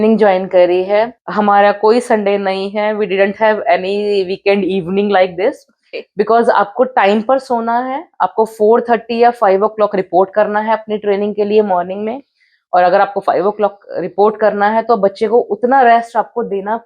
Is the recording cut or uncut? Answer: cut